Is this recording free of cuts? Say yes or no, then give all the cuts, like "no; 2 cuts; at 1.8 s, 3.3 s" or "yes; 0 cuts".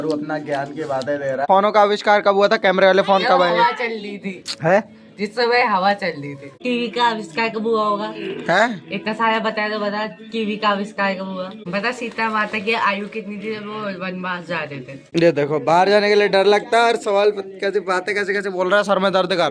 no; 4 cuts; at 1.4 s, 6.6 s, 11.6 s, 15.0 s